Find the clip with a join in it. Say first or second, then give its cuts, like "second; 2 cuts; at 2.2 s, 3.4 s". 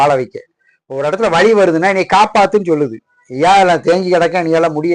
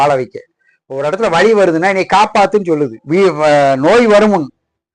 second; 1 cut; at 3.0 s